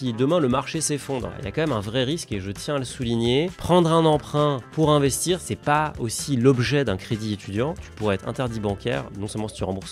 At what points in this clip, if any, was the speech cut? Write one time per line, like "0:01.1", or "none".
0:01.3
0:05.5
0:07.8